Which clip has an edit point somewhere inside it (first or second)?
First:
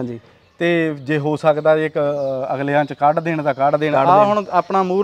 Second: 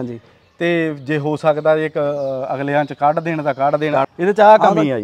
second